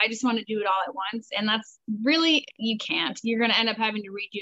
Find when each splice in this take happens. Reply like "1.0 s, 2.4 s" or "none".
none